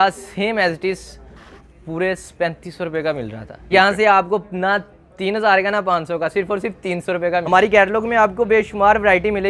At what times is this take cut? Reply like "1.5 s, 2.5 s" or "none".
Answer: 3.5 s, 7.4 s

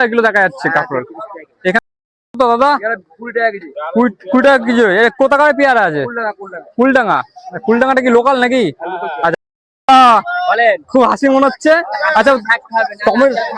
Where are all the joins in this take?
1.8 s, 9.3 s

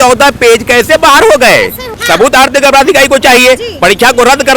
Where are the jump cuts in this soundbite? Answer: 2.0 s

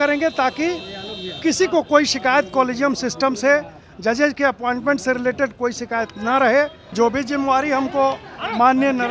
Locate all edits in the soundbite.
6.8 s

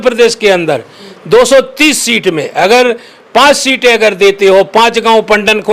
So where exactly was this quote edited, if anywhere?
none

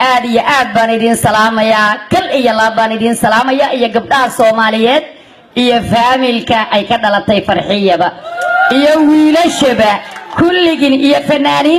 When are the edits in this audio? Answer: 7.2 s

